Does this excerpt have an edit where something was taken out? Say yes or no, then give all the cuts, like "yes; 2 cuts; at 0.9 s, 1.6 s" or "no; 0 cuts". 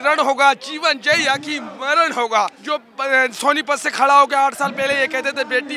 yes; 1 cut; at 2.6 s